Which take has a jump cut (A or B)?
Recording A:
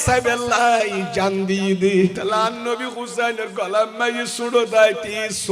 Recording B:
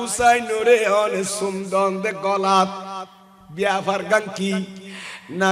A